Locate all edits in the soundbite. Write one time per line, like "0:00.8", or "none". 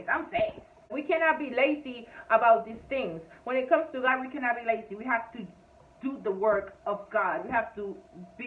0:01.0